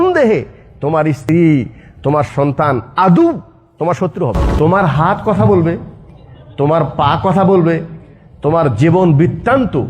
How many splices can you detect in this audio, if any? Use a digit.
3